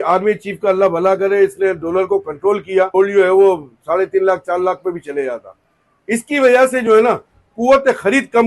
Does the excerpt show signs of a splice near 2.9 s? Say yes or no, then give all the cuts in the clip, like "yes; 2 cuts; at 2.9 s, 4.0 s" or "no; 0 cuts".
yes; 1 cut; at 2.9 s